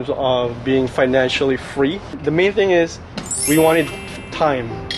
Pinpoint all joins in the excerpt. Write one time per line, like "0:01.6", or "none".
0:02.2